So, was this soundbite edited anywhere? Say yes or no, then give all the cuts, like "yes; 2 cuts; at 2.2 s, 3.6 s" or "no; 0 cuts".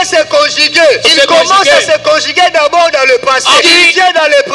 yes; 2 cuts; at 1.1 s, 3.6 s